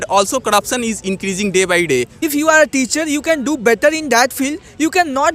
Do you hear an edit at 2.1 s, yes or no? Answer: yes